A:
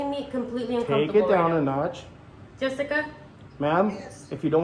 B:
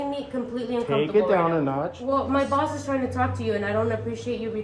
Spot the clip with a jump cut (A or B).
B